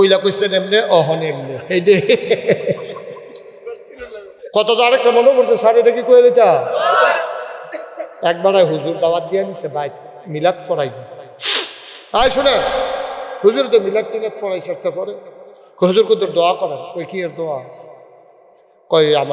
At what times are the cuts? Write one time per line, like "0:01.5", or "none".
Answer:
0:04.4